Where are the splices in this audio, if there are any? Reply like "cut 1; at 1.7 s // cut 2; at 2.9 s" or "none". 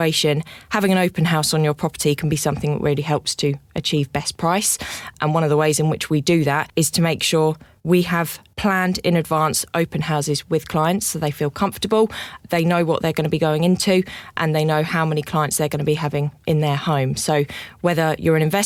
none